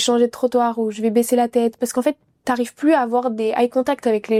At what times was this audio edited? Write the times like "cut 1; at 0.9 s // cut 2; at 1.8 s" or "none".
none